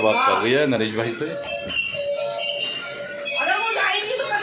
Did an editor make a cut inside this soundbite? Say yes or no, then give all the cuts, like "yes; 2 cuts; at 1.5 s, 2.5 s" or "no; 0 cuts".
no; 0 cuts